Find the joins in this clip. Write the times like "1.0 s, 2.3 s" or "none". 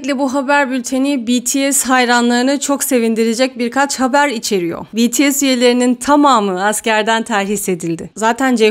none